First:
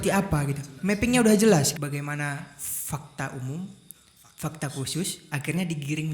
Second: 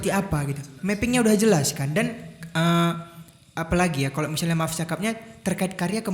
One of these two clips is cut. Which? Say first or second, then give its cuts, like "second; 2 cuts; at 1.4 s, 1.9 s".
first; 1 cut; at 1.8 s